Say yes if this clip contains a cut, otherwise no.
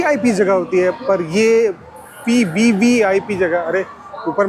no